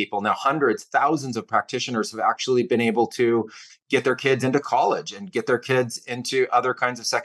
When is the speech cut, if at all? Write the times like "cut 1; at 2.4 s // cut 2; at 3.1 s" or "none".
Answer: none